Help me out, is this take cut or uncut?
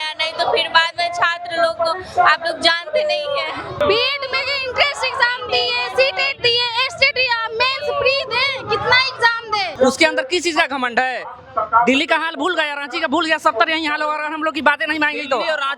cut